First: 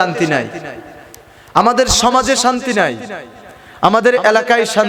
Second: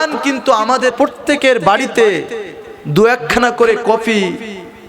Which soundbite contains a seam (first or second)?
second